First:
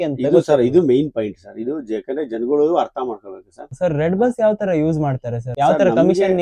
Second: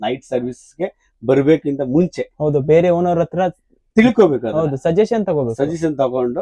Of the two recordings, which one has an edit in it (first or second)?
first